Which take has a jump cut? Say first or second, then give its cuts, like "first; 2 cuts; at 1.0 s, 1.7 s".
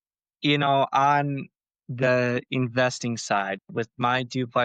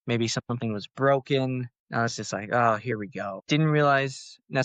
second; 2 cuts; at 1.8 s, 3.4 s